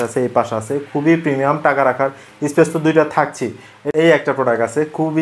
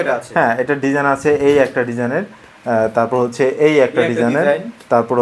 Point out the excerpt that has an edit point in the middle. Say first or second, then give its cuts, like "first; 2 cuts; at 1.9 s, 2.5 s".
first; 1 cut; at 3.9 s